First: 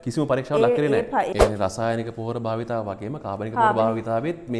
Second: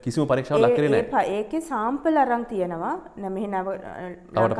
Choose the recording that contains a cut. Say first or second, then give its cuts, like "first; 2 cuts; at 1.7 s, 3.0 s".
first; 1 cut; at 1.3 s